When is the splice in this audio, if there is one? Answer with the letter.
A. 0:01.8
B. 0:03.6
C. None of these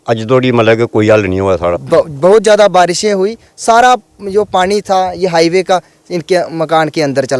A